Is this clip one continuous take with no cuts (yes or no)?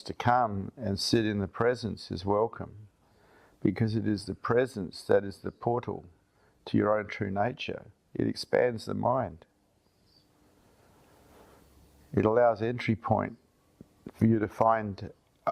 yes